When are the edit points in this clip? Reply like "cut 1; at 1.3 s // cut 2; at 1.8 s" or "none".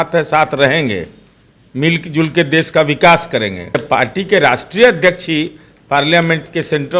cut 1; at 3.8 s